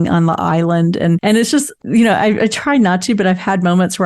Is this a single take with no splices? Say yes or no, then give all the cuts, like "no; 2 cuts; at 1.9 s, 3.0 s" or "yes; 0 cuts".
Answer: no; 1 cut; at 1.5 s